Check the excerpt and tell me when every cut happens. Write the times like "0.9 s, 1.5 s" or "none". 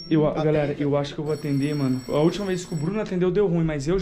2.0 s